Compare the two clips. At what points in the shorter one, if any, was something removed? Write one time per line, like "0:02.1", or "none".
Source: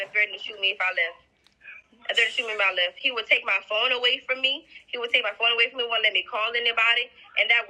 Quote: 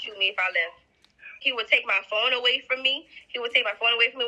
0:01.4